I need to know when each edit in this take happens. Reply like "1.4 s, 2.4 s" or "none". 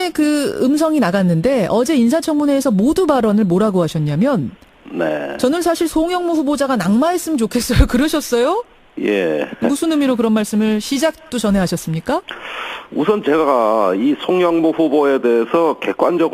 6.1 s